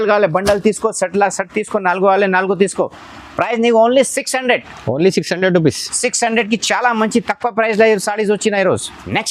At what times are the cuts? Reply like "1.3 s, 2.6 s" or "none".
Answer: none